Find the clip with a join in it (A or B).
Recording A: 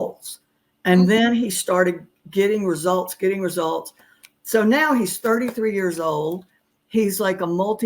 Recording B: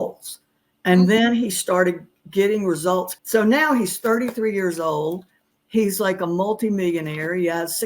B